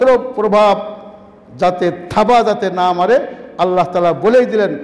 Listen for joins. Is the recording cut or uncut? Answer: uncut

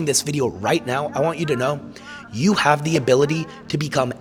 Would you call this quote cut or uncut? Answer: uncut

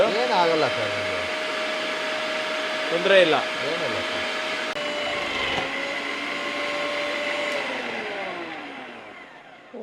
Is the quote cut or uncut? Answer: cut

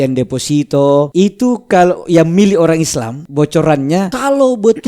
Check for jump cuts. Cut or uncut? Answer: cut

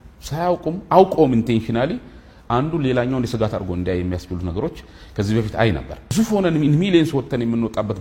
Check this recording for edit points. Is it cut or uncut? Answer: cut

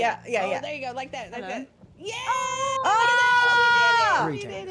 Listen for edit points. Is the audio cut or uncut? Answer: uncut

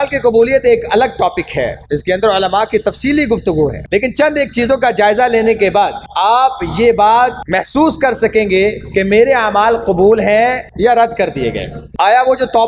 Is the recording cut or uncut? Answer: cut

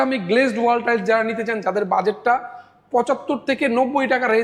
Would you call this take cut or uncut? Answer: uncut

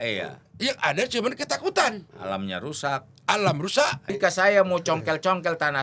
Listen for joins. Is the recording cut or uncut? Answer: cut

